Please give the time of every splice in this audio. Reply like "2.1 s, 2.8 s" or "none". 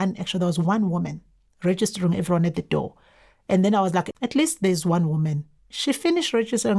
4.1 s, 5.7 s